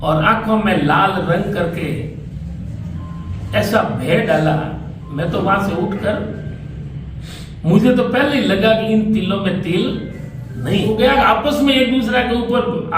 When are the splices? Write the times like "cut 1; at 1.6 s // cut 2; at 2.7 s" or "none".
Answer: cut 1; at 10.9 s